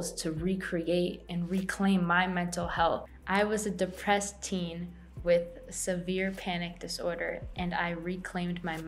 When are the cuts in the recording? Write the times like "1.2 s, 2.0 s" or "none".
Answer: 3.1 s